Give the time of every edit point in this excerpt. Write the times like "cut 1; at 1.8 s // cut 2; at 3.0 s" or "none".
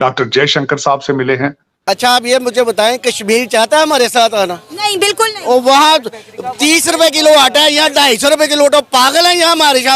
cut 1; at 1.7 s